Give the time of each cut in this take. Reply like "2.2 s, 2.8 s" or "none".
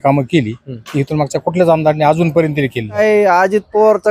3.0 s